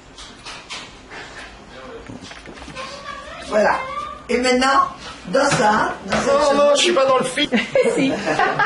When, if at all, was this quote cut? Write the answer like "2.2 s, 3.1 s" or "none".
7.4 s